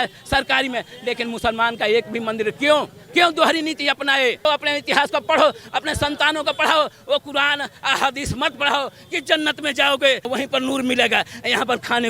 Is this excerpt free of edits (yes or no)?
no